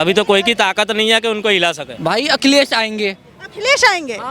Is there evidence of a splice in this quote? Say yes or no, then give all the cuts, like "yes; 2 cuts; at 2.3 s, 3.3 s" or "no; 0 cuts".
yes; 1 cut; at 1.9 s